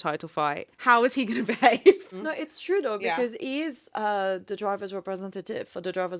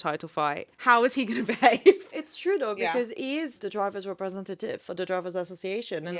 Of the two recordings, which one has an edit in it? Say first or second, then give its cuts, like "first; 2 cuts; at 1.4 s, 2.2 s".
second; 2 cuts; at 2.1 s, 3.6 s